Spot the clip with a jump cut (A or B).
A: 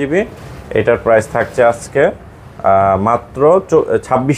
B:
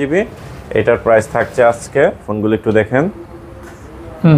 B